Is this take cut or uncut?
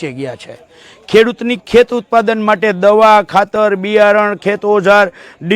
uncut